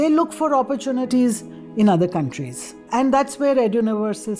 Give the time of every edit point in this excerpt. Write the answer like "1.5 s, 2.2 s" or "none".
1.1 s, 2.8 s